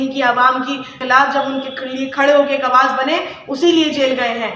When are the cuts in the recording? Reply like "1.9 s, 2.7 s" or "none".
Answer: 1.0 s